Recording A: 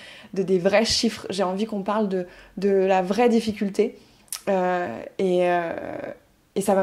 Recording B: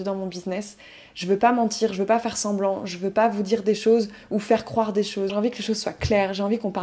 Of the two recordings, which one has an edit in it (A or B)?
B